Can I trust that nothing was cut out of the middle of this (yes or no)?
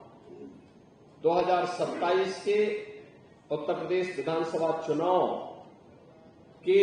yes